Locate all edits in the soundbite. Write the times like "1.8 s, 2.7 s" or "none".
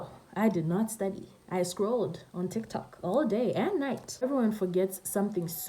4.2 s